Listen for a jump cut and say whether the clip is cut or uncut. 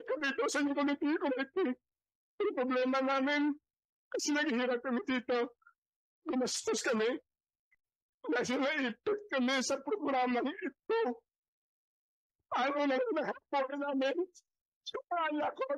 uncut